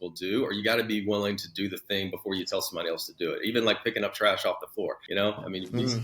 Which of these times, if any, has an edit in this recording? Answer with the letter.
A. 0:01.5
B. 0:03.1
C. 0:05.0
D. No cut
C